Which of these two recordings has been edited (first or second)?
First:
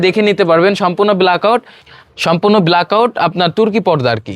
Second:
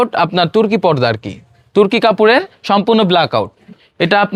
first